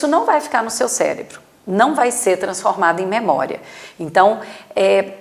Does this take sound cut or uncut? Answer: uncut